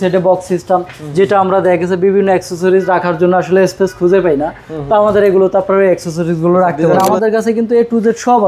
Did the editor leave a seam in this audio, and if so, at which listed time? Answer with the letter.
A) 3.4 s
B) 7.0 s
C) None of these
B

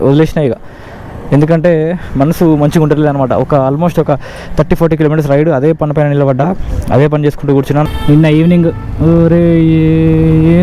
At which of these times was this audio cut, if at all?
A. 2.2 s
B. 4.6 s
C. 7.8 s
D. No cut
C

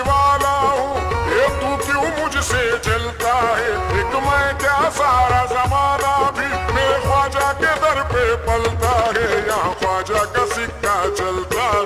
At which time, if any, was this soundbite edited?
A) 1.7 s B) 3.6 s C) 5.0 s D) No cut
D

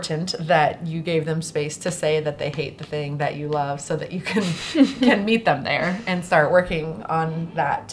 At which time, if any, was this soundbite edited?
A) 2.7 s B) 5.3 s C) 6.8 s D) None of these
D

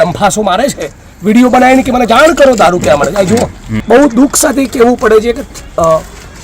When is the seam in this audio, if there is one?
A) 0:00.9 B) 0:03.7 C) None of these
B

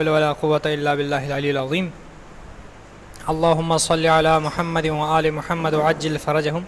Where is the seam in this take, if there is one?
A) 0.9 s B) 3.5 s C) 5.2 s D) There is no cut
B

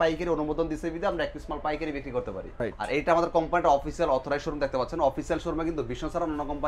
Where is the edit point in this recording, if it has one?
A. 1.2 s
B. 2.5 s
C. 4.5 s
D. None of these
B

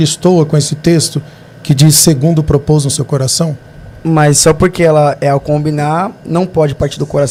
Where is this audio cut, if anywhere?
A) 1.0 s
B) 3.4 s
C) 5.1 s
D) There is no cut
D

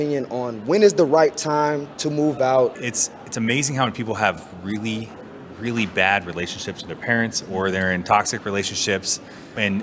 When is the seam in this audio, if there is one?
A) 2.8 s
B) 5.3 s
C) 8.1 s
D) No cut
A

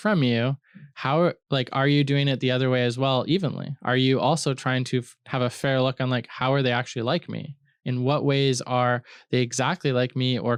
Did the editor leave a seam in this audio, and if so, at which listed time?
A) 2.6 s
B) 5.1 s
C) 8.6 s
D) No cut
D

